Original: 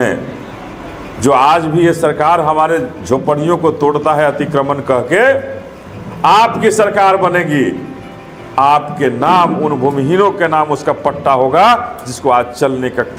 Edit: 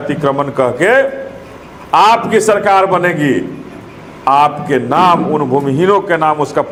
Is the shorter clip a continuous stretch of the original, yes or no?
yes